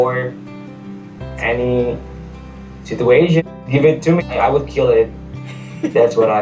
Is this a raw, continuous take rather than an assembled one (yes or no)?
no